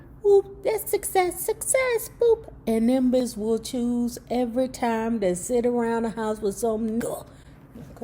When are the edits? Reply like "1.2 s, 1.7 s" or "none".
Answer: 3.2 s, 7.0 s